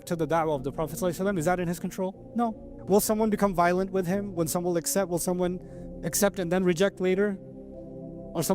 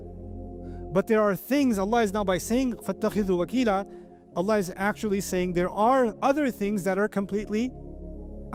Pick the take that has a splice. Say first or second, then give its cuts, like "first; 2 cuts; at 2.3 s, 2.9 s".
first; 1 cut; at 2.5 s